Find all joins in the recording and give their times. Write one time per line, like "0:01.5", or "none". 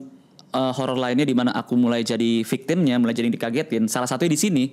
none